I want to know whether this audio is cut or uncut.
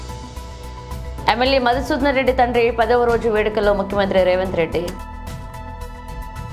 uncut